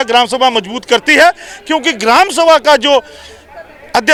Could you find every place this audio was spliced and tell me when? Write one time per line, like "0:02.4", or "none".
none

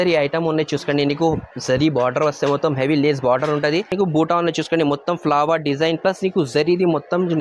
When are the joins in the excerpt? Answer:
0:03.9

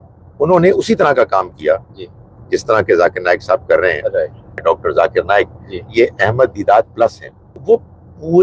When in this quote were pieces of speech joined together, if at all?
0:04.6
0:07.6

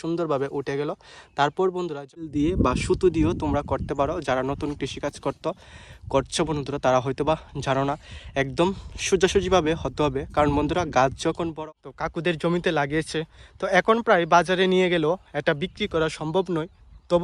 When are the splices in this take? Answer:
0:02.3
0:11.6

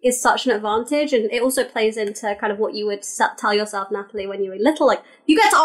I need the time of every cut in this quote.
none

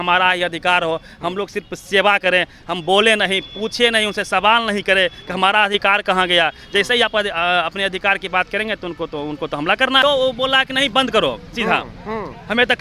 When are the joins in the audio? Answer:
0:10.0

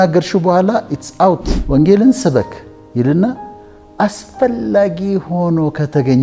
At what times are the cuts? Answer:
0:01.5

